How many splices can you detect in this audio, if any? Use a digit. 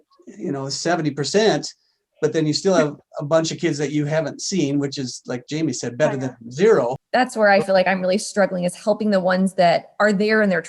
1